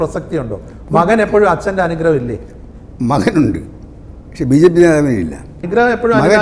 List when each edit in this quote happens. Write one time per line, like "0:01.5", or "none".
0:05.5